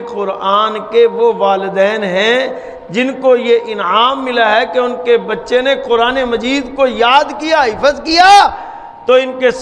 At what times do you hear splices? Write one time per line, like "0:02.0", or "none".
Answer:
none